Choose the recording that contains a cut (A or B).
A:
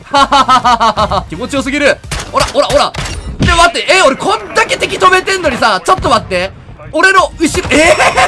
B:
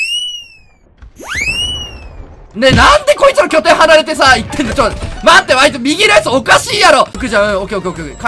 B